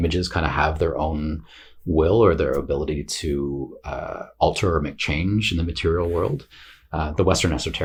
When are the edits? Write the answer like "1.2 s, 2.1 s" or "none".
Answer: none

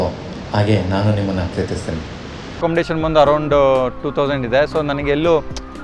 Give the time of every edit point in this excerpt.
2.6 s

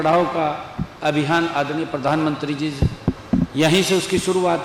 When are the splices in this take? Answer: none

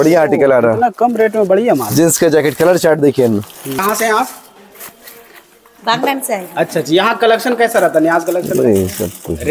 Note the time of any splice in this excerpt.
3.8 s

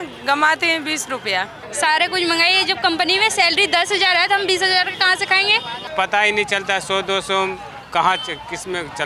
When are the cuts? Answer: 1.6 s, 5.9 s

